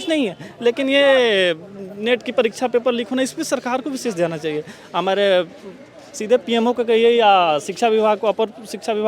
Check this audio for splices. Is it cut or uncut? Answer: uncut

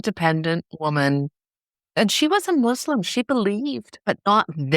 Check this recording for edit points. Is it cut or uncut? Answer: cut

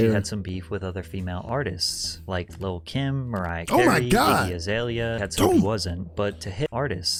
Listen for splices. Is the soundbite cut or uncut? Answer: uncut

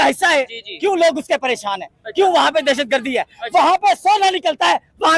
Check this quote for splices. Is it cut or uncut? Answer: uncut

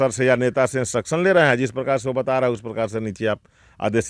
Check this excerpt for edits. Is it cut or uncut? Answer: uncut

